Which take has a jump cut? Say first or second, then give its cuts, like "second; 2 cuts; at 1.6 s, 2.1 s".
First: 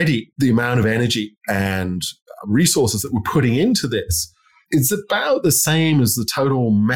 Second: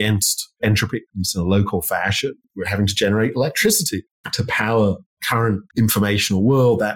second; 2 cuts; at 2.4 s, 5.3 s